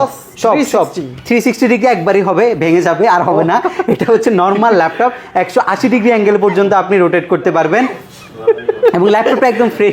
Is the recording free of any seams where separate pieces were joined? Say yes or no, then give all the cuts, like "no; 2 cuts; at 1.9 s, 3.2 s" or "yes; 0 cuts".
yes; 0 cuts